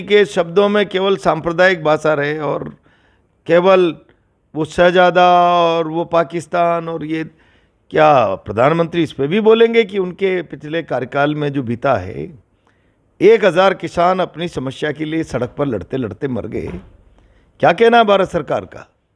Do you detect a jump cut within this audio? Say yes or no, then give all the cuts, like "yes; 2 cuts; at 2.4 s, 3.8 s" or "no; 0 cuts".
no; 0 cuts